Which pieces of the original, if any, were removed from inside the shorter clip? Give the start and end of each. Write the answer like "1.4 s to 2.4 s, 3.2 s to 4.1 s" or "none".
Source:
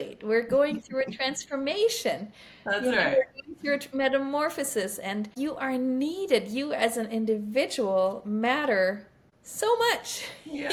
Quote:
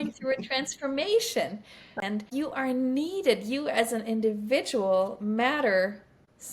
2.6 s to 5.0 s